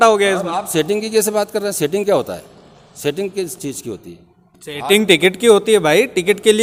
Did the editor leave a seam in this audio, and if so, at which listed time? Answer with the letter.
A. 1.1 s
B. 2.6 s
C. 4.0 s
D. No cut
D